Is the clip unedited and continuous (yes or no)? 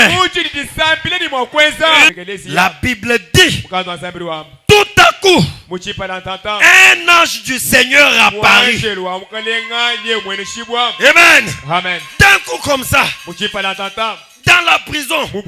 no